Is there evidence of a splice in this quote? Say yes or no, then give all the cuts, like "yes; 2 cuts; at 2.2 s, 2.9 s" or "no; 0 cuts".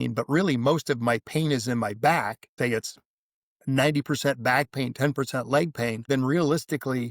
yes; 2 cuts; at 2.4 s, 6.1 s